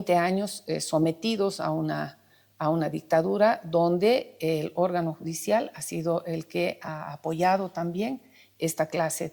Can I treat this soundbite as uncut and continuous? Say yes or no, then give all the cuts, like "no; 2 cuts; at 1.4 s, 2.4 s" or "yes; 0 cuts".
yes; 0 cuts